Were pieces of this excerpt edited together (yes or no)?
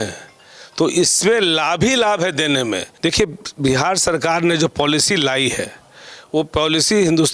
yes